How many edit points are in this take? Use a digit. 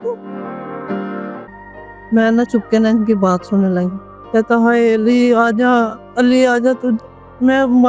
1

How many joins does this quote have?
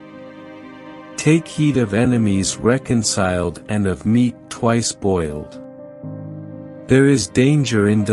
2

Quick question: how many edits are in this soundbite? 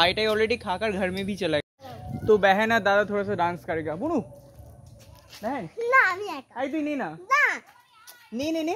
1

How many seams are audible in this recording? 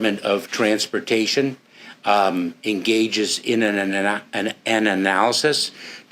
0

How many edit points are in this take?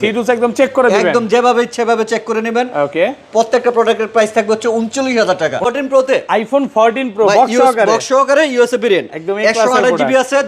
1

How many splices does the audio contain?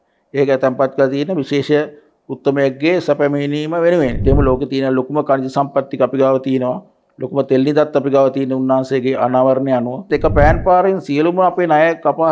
2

